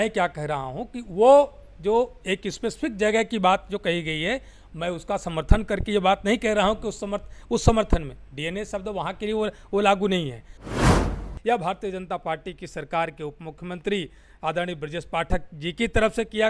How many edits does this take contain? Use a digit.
1